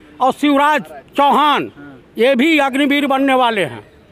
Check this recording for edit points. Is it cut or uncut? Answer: uncut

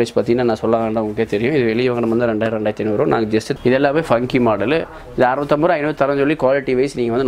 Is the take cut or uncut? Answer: cut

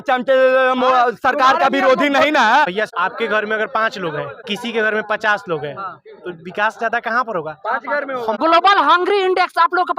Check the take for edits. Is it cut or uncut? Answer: cut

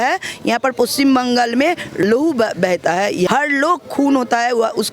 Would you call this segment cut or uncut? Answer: cut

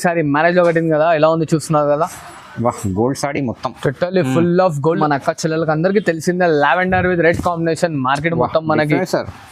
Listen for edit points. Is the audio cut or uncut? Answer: cut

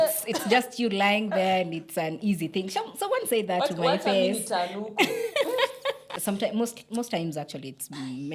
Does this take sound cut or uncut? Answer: cut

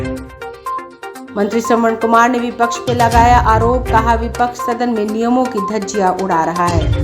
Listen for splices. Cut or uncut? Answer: uncut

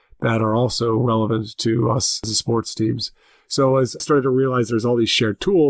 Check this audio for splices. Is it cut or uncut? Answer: cut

